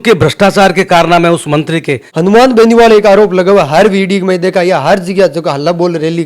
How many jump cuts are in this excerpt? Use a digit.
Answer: 1